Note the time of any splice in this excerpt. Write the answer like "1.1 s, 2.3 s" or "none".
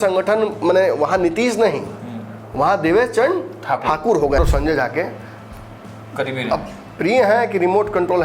4.4 s